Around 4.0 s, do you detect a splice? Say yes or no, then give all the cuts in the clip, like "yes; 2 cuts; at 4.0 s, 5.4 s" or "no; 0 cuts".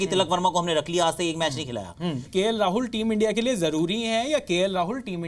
no; 1 cut; at 2.2 s